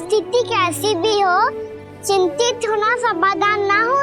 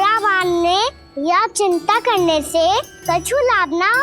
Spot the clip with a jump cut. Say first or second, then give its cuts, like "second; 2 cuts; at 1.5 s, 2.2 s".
second; 2 cuts; at 1.1 s, 2.9 s